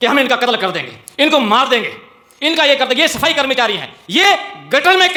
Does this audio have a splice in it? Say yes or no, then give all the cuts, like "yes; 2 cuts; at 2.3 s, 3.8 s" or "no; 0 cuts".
no; 0 cuts